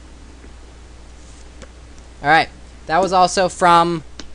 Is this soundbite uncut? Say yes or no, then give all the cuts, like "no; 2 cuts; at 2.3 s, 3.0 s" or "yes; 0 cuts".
yes; 0 cuts